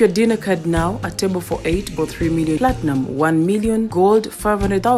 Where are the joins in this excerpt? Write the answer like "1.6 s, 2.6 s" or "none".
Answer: none